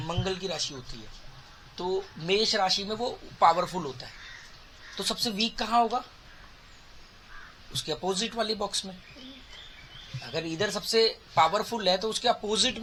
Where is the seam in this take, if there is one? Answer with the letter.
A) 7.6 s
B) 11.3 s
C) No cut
C